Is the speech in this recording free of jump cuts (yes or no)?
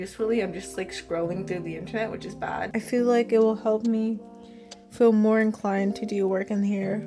no